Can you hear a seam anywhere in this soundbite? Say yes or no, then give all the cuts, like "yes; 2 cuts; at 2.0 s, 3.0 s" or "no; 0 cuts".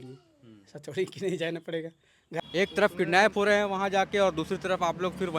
yes; 1 cut; at 2.4 s